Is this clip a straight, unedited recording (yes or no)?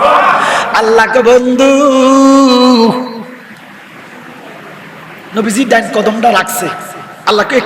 yes